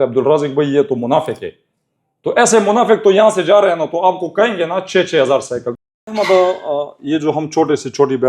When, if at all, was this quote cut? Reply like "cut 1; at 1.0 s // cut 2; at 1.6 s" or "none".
cut 1; at 5.8 s